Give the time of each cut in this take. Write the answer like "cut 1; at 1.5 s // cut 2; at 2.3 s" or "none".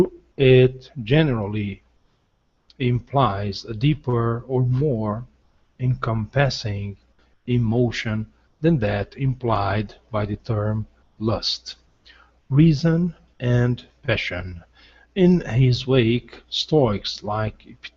cut 1; at 8.3 s